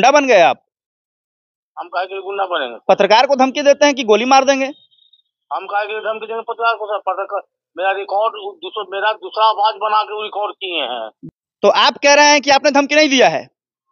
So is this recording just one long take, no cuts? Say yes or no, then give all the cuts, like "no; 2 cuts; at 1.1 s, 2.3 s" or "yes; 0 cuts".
no; 1 cut; at 11.2 s